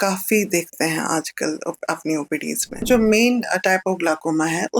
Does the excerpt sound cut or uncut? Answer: cut